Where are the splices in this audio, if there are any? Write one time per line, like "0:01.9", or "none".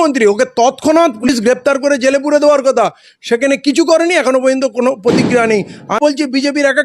0:01.2
0:05.9